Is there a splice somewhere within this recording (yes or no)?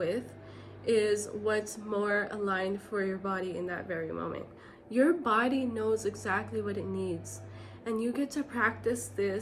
no